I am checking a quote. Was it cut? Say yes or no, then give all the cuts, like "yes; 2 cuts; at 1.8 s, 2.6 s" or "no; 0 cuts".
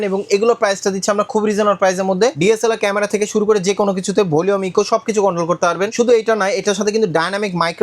yes; 2 cuts; at 2.4 s, 5.9 s